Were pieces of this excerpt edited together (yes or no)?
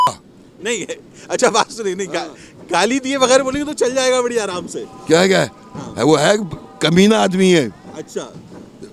no